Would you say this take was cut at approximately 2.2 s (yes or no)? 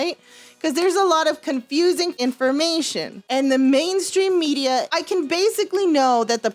yes